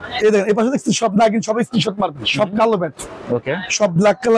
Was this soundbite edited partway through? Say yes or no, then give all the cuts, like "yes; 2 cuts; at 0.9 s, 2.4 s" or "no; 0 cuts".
no; 0 cuts